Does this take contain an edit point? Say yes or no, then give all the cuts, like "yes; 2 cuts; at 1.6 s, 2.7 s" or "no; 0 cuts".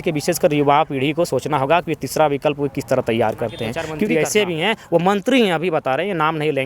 yes; 1 cut; at 3.9 s